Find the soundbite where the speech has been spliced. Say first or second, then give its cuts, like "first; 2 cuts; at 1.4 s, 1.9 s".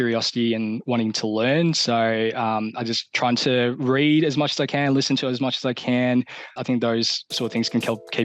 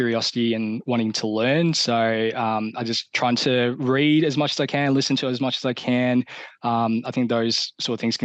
first; 1 cut; at 6.6 s